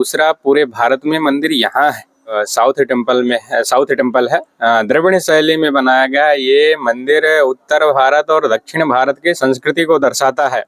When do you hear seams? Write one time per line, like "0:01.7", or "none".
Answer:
0:02.4